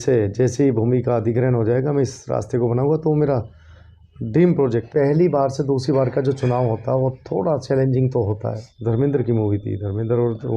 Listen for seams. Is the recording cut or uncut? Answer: cut